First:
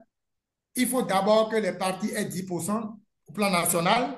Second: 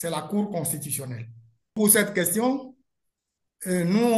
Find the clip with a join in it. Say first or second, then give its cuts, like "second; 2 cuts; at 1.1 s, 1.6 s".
second; 1 cut; at 1.8 s